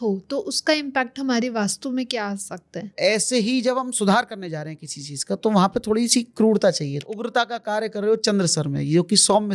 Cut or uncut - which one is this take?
cut